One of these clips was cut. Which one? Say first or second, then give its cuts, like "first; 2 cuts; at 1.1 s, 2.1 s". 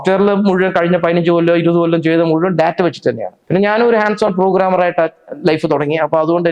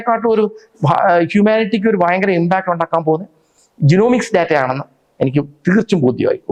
first; 1 cut; at 3.3 s